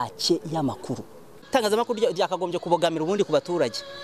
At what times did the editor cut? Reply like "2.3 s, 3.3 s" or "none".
1.4 s